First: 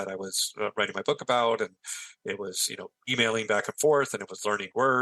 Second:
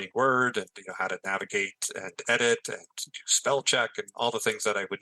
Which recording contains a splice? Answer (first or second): first